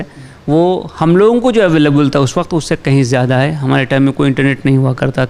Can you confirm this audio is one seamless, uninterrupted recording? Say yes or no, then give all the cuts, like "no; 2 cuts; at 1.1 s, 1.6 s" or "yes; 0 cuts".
yes; 0 cuts